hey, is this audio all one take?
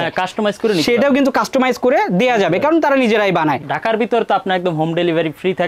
no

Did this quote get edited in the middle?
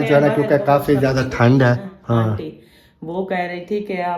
yes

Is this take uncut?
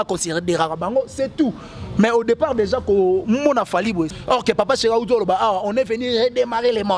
no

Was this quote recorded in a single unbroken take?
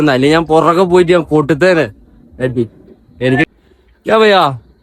no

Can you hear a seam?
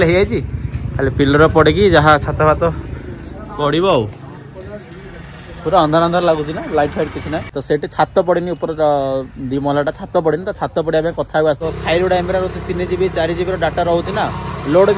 yes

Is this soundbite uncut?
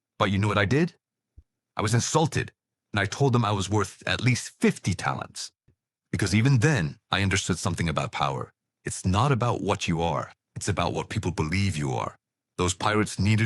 no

